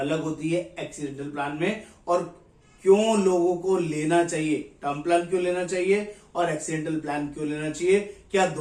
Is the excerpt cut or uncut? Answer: uncut